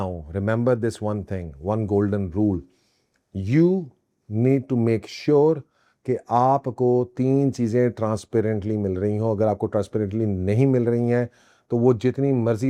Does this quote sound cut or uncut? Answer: uncut